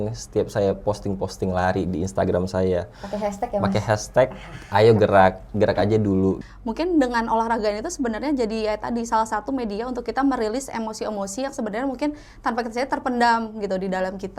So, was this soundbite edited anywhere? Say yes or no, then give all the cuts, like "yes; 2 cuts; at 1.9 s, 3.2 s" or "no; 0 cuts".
yes; 1 cut; at 6.5 s